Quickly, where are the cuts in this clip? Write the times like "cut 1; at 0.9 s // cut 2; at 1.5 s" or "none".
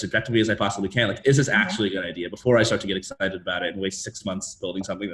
none

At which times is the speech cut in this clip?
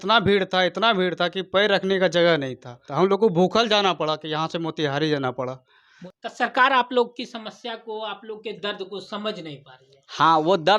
cut 1; at 2.8 s // cut 2; at 6.0 s

